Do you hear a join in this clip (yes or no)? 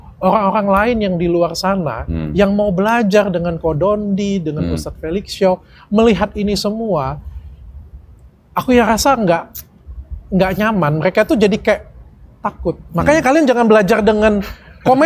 no